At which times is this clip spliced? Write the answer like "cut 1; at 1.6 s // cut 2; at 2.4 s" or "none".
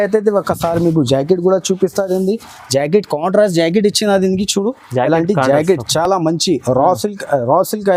none

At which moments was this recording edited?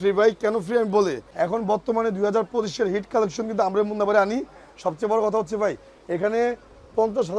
cut 1; at 1.2 s

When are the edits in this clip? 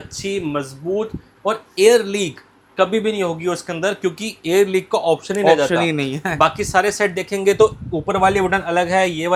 none

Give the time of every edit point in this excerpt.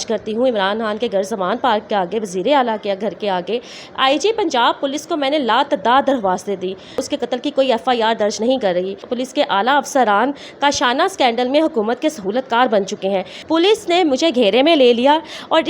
cut 1; at 7.0 s // cut 2; at 9.1 s // cut 3; at 13.3 s

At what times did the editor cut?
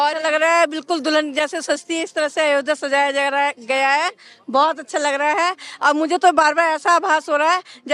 none

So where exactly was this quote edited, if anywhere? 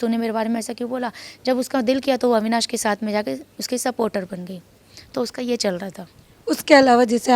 none

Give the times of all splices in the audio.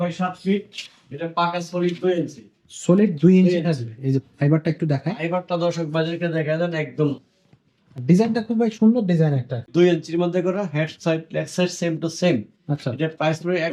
cut 1; at 9.7 s

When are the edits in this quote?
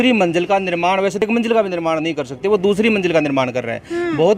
cut 1; at 1.2 s

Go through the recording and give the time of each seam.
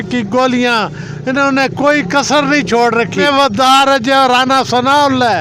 cut 1; at 3.2 s

